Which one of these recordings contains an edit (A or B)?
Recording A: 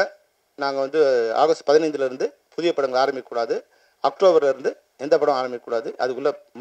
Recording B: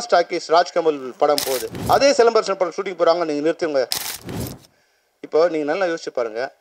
B